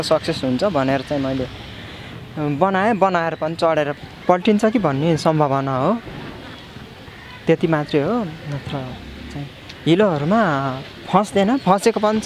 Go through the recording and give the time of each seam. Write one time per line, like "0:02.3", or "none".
0:04.0